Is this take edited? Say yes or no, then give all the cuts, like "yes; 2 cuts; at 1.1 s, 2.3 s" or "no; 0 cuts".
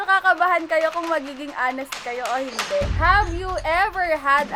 no; 0 cuts